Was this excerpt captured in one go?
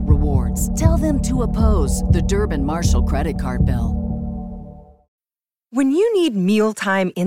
no; 1 cut; at 5.1 s

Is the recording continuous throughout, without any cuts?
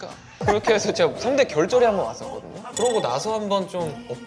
yes; 0 cuts

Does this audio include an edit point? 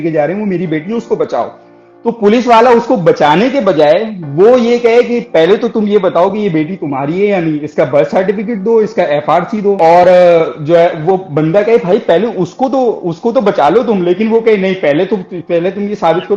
no; 0 cuts

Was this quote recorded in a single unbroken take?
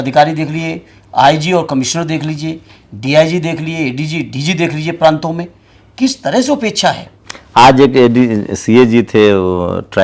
yes; 0 cuts

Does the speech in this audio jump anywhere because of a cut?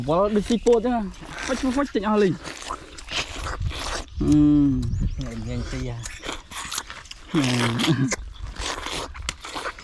no; 0 cuts

